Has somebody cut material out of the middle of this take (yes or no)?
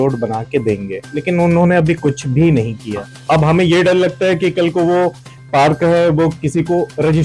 yes